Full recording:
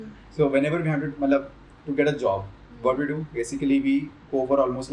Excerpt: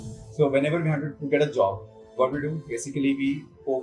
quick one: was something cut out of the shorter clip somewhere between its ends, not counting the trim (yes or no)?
yes